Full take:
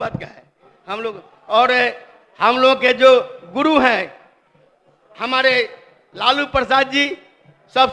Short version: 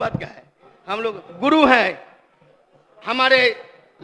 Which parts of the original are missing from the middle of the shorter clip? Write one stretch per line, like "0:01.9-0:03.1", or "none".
0:01.3-0:03.4

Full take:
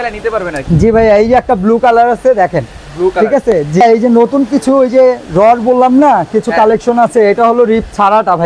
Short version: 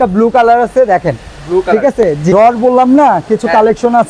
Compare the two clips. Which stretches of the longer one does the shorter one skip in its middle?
0:03.8-0:05.3

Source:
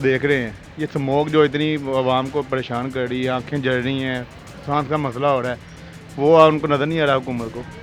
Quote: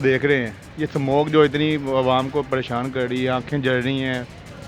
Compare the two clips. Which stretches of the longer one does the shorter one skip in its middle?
none

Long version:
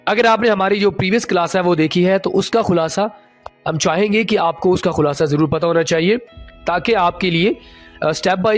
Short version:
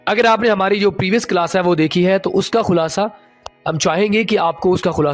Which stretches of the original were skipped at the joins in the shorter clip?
none

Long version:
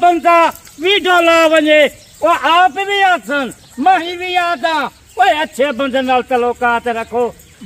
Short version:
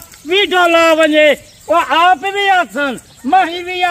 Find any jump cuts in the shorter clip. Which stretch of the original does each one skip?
none

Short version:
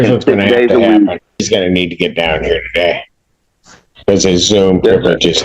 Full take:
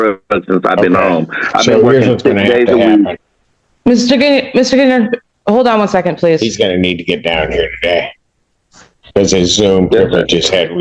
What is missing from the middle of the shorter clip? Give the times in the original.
0:03.4-0:06.5

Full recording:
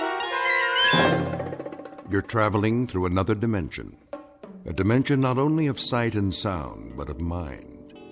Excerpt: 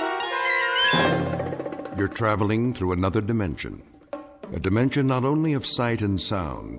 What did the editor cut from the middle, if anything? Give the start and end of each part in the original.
0:01.8-0:01.9

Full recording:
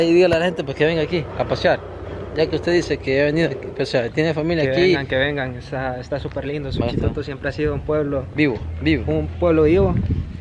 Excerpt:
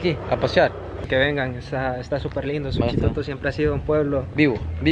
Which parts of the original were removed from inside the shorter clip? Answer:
0:02.1-0:05.0

